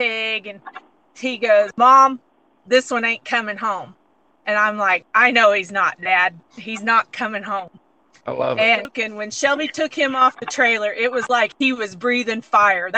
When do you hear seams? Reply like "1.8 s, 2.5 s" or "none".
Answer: 9.0 s